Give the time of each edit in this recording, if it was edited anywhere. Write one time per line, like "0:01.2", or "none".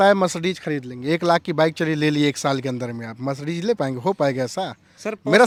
none